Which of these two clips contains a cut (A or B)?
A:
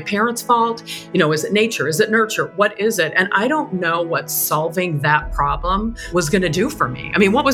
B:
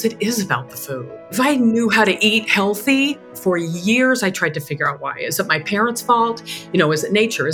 B